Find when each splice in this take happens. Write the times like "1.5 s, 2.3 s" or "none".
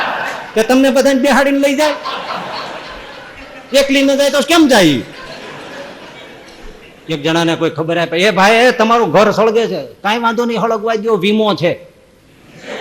7.2 s